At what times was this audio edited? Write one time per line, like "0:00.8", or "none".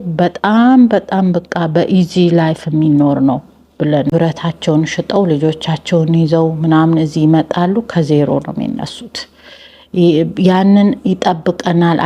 0:04.1